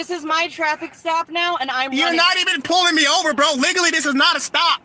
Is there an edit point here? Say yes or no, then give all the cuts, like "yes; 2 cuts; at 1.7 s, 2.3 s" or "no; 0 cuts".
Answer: no; 0 cuts